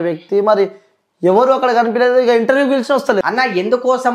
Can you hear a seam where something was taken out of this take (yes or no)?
yes